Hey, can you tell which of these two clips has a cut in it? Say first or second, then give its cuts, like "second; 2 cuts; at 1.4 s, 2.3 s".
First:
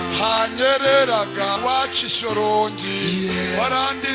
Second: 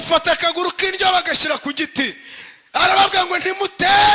first; 1 cut; at 1.6 s